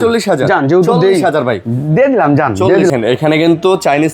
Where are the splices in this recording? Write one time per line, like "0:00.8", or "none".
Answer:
0:02.9